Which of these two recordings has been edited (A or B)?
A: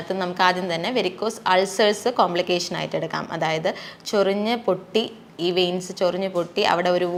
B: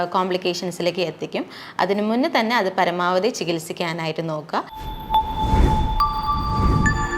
B